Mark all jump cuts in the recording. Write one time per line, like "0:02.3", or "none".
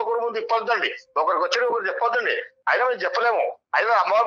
none